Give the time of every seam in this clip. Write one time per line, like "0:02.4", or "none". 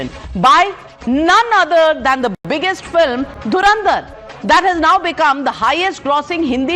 none